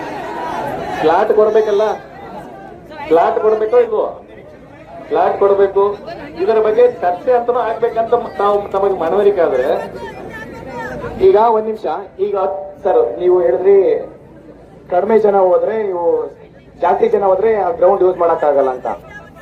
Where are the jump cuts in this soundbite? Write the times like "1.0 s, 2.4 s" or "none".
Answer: none